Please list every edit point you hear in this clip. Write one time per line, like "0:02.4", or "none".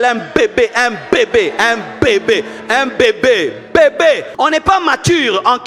0:04.3